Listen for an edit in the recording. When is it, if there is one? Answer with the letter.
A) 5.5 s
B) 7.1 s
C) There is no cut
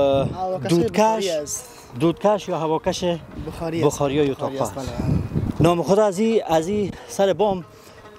A